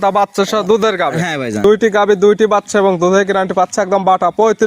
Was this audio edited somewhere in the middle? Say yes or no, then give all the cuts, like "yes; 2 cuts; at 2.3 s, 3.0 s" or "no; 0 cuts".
yes; 1 cut; at 1.6 s